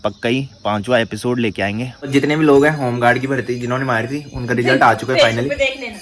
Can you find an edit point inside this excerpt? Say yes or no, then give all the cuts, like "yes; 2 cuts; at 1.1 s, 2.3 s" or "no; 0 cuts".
yes; 1 cut; at 2.1 s